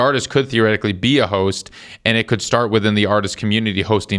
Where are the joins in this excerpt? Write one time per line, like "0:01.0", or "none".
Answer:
none